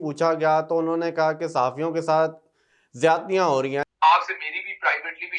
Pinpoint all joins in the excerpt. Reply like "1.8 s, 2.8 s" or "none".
3.8 s